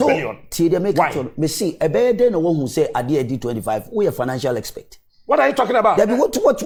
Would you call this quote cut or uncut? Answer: uncut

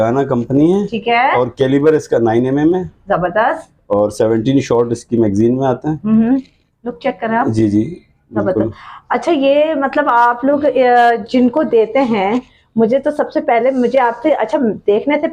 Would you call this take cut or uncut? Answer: uncut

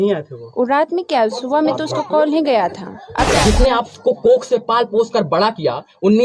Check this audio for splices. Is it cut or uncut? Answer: cut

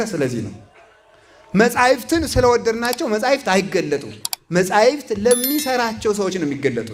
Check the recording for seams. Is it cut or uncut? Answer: uncut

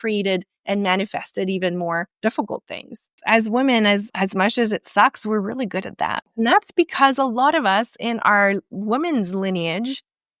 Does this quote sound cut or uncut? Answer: cut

